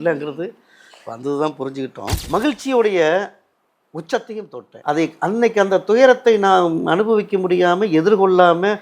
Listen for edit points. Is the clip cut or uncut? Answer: cut